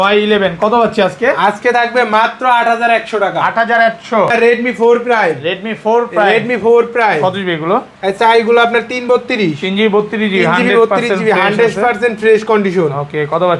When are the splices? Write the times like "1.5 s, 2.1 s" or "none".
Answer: 4.3 s